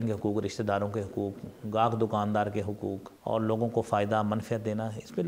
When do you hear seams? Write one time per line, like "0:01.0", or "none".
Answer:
0:03.1